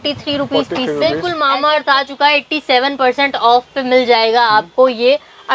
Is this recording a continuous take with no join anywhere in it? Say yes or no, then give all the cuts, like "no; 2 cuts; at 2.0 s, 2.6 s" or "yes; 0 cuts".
no; 1 cut; at 1.3 s